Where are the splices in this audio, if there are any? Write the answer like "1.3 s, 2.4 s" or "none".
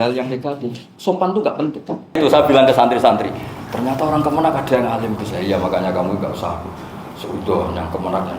2.2 s